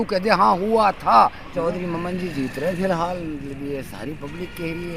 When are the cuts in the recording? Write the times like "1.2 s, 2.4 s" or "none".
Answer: 1.5 s